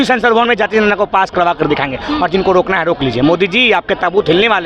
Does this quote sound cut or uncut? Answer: uncut